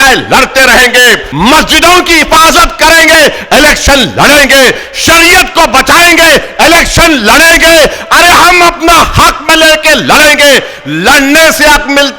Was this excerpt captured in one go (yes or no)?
no